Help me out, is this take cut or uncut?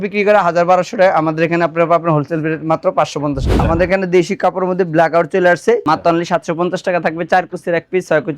cut